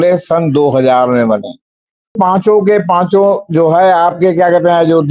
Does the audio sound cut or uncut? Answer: cut